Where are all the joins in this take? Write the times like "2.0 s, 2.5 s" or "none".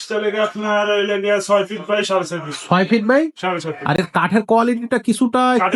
none